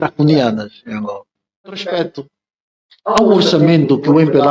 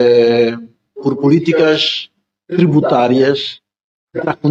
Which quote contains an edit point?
first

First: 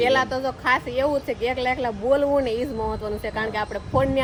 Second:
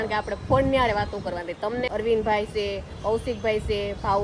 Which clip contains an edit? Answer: second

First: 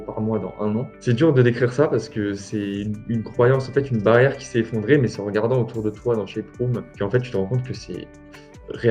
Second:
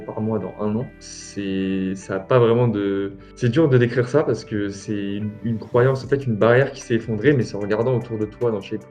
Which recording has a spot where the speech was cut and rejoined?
first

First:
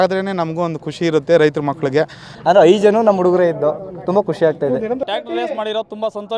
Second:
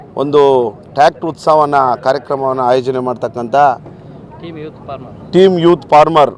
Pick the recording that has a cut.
first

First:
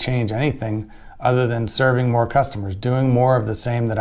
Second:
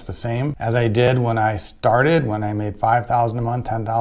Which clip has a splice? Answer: second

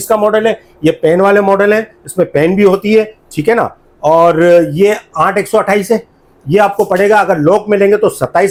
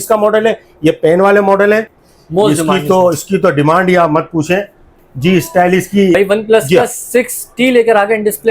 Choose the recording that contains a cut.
second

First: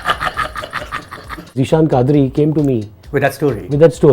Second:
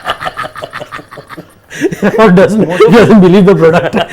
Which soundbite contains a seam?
first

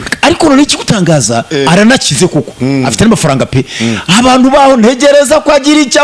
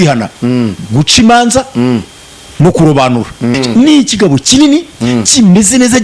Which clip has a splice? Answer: second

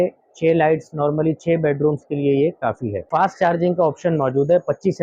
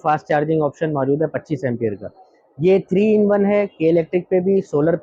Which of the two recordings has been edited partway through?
first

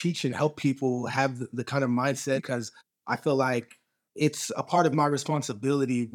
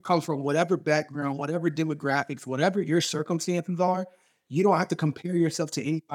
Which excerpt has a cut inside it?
first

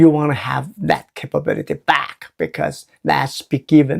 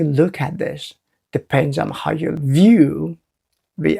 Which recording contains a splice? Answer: second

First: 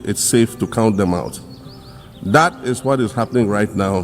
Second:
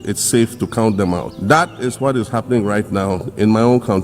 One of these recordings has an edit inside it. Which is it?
second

